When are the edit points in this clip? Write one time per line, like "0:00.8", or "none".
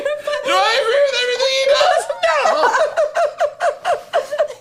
none